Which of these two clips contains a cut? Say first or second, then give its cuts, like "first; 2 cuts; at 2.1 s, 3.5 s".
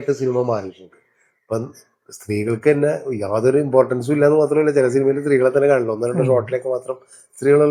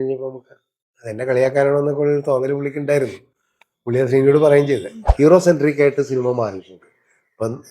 second; 1 cut; at 5.0 s